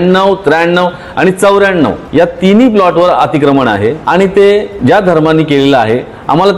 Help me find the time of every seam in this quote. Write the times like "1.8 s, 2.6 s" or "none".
2.0 s, 4.0 s, 4.7 s